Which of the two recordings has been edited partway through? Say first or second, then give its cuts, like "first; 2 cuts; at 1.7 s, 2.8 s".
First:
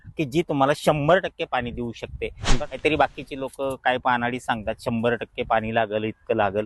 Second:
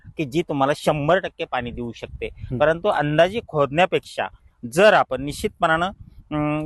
first; 1 cut; at 2.4 s